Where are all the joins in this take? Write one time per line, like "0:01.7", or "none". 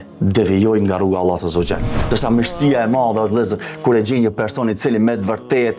0:02.0